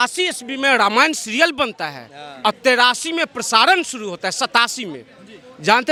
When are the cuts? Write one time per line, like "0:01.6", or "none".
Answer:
none